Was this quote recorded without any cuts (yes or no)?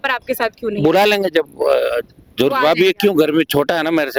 yes